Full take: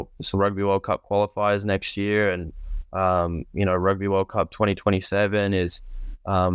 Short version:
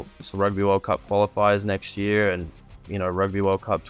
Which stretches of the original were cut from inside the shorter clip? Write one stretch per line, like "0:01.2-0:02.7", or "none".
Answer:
0:02.8-0:03.4

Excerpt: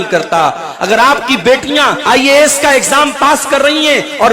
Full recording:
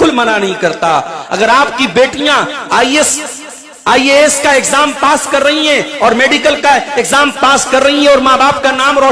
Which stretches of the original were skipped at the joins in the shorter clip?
0:02.5-0:03.8

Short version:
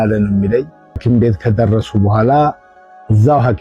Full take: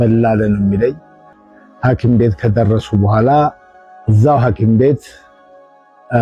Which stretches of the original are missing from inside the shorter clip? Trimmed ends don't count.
0:01.3-0:02.0

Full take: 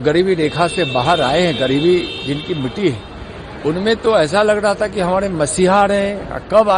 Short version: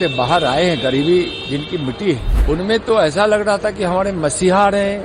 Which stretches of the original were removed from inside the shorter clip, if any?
0:03.1-0:03.5

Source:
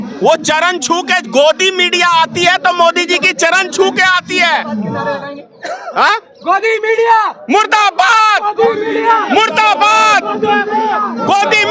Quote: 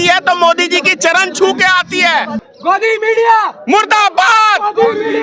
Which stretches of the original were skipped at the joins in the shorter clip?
0:04.8-0:06.2

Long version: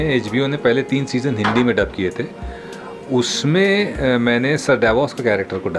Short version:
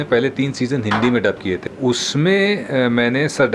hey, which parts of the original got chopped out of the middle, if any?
0:02.2-0:03.0

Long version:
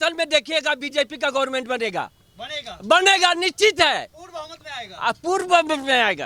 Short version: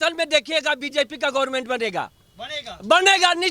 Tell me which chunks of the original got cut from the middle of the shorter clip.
none

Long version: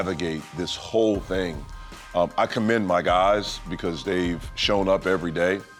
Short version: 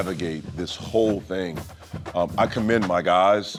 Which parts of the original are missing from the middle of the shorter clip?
none

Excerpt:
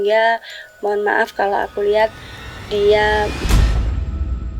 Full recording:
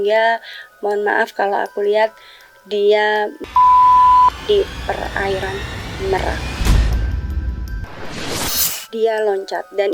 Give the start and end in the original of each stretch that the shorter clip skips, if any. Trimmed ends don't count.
0:03.4-0:06.5

